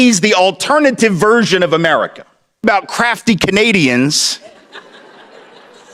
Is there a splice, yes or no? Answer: yes